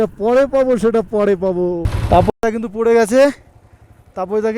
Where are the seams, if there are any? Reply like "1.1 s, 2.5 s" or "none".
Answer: 1.9 s